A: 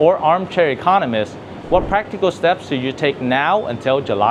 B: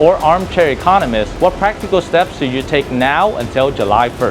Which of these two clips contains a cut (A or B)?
B